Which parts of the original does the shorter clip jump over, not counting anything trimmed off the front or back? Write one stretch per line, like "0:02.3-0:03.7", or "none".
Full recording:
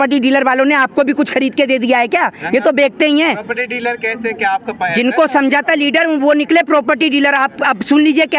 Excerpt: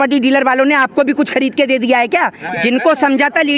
0:02.4-0:04.7

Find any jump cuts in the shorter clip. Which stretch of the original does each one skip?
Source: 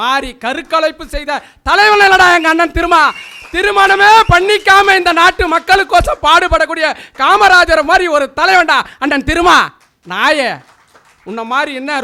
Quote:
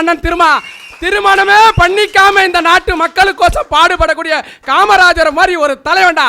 none

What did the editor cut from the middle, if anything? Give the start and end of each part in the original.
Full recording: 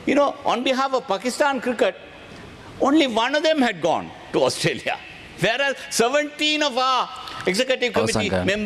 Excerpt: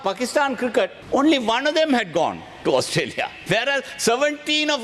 0:02.0-0:02.7
0:05.0-0:05.2

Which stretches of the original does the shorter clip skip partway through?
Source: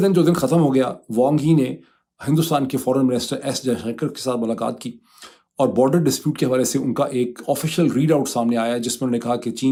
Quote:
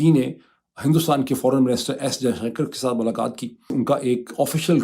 0:05.1-0:06.8

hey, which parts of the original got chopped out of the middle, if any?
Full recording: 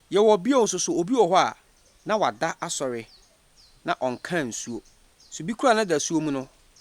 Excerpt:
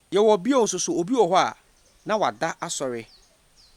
none

